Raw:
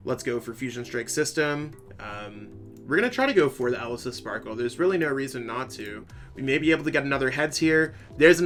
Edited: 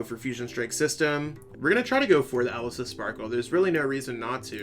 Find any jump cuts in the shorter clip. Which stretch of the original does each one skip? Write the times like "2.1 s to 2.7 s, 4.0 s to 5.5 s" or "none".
1.8 s to 2.7 s